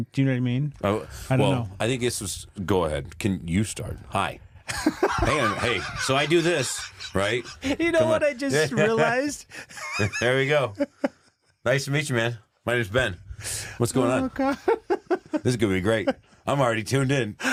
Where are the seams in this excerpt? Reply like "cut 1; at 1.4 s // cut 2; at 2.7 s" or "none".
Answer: none